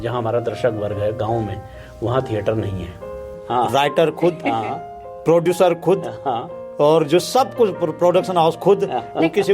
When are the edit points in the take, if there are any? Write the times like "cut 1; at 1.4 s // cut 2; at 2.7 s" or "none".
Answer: cut 1; at 3.4 s